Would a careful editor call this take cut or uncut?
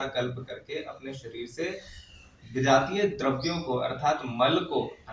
uncut